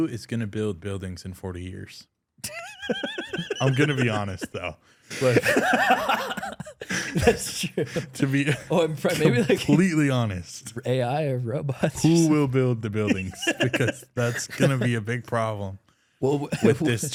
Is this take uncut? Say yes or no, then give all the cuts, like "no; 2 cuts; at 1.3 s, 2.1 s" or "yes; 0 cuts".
yes; 0 cuts